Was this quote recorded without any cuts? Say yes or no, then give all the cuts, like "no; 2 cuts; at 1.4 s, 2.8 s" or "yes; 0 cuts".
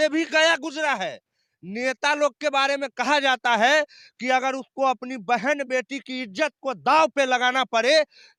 yes; 0 cuts